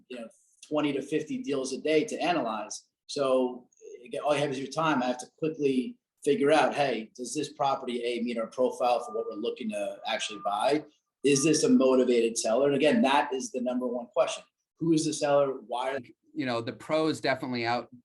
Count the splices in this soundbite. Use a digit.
1